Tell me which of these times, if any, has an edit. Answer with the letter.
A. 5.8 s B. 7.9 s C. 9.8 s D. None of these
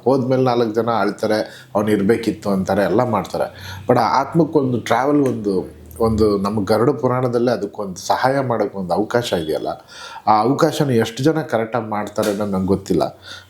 D